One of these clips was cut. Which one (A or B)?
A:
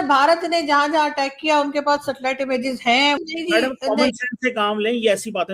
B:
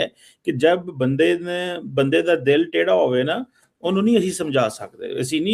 A